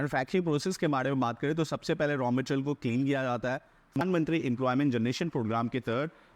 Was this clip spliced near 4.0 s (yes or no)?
yes